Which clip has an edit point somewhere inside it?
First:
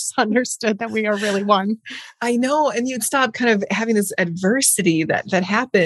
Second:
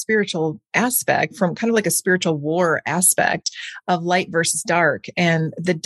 second; 1 cut; at 1.3 s

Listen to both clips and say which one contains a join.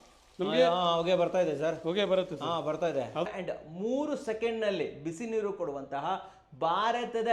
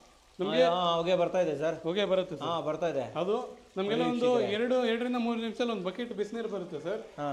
first; 1 cut; at 3.3 s

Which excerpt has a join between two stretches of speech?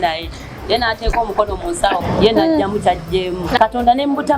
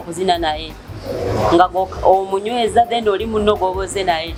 first; 2 cuts; at 2.1 s, 3.6 s

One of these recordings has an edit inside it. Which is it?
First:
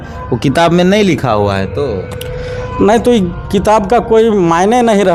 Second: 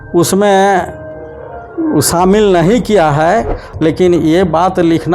second; 1 cut; at 3.6 s

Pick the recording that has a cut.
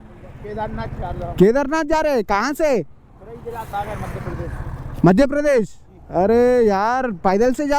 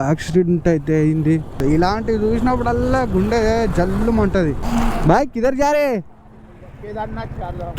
second; 1 cut; at 4.6 s

